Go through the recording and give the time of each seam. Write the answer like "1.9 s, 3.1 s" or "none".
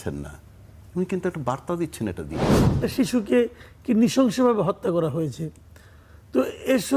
2.8 s